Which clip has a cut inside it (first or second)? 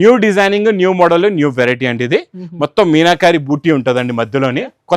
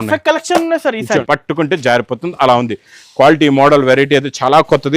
second